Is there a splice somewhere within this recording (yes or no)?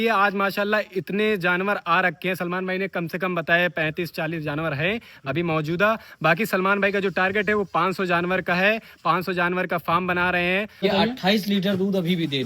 yes